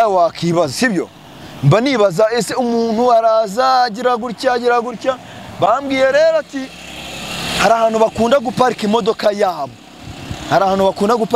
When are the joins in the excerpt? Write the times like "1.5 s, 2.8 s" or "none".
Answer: none